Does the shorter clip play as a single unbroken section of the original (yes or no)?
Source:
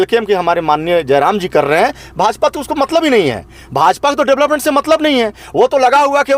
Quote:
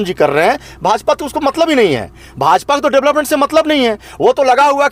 yes